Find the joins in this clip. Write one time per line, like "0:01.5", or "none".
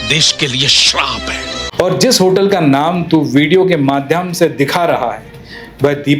0:01.6